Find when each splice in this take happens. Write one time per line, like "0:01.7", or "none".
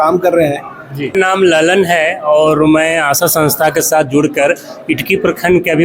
0:01.1